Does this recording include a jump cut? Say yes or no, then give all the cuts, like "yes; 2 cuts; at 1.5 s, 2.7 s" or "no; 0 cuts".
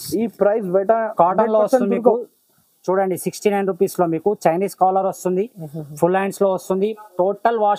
no; 0 cuts